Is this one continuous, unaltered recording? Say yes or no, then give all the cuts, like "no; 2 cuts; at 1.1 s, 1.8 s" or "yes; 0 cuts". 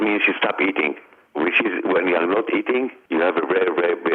no; 1 cut; at 1.2 s